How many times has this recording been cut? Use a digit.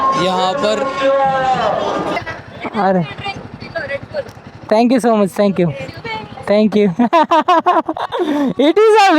1